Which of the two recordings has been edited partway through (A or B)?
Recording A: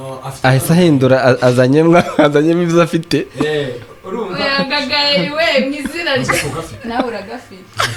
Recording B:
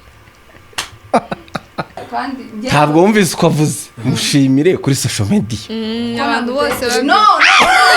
B